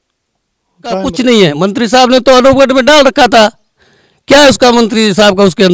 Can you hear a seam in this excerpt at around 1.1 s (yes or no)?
yes